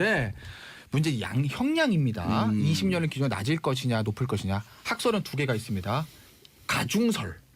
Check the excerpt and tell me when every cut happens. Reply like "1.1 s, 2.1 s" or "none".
3.4 s

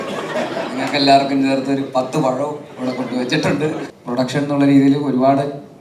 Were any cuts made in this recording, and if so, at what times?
3.9 s

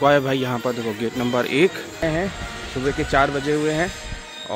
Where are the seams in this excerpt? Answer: 2.0 s

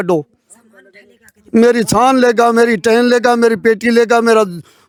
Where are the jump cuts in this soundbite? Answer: none

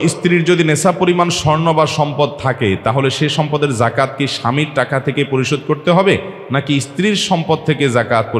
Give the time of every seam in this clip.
none

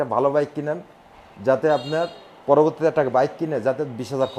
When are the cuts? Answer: none

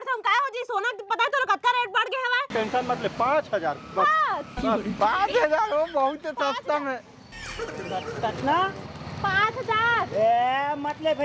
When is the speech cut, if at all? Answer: 2.5 s

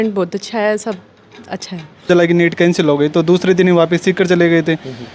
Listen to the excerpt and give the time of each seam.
2.1 s

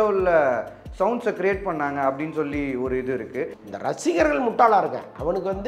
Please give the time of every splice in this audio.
3.6 s

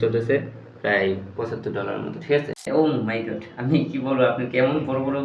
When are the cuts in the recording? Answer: 2.7 s

